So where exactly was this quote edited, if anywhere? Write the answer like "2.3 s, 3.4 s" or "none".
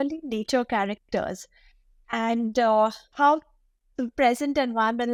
none